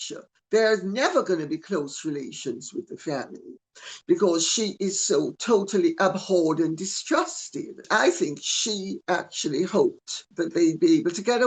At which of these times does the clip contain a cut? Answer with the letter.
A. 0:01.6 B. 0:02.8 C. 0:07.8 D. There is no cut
C